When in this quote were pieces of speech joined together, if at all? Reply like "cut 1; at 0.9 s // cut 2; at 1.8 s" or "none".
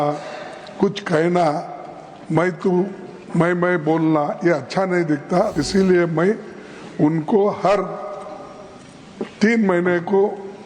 cut 1; at 5.6 s